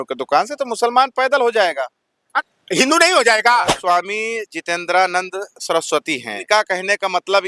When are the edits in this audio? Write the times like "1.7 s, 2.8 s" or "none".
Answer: 2.3 s, 3.8 s, 6.4 s

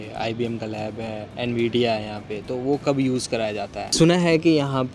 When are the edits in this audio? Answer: 1.3 s, 3.8 s

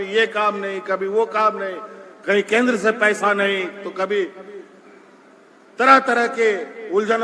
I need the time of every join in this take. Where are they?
none

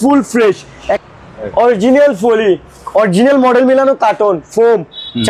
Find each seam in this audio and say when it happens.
1.0 s

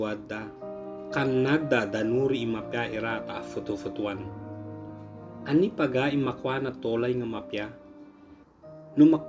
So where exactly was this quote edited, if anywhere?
none

